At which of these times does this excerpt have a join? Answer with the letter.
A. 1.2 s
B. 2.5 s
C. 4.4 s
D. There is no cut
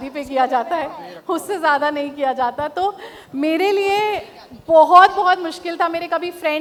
D